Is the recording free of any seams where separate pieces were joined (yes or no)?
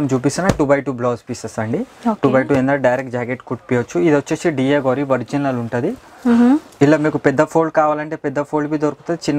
yes